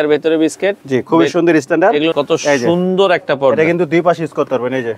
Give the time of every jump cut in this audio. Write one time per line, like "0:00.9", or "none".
0:02.1

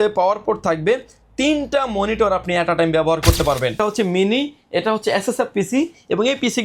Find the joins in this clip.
0:03.8

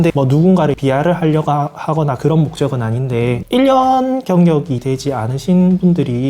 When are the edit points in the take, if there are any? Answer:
0:03.4

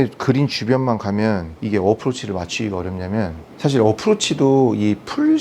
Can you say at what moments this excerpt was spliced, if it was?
0:01.5
0:03.4

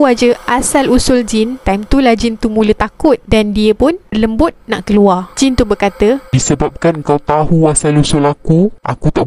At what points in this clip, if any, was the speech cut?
none

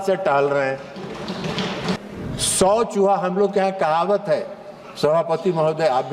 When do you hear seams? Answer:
0:02.0

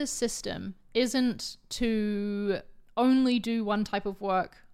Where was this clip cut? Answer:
none

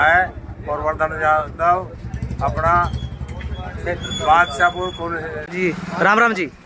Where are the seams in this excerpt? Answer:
0:05.5

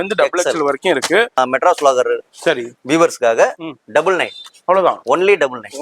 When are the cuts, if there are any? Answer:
0:01.4

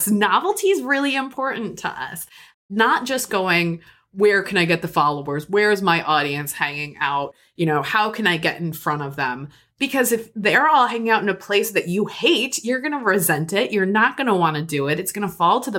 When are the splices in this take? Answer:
0:02.4

